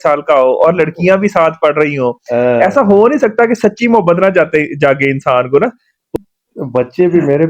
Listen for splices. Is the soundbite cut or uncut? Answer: cut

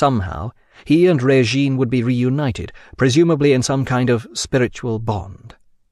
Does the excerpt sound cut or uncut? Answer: uncut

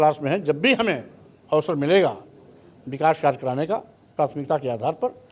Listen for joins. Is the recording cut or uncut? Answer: uncut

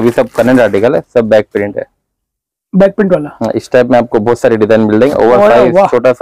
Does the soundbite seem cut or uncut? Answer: uncut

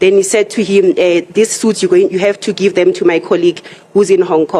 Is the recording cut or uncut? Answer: uncut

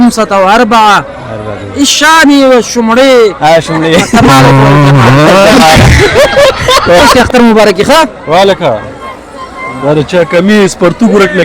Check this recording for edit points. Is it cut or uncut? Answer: cut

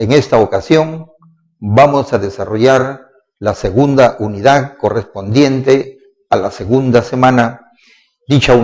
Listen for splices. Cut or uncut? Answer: cut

